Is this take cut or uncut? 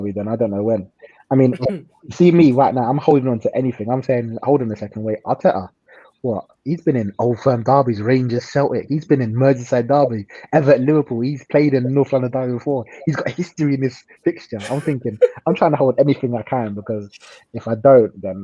uncut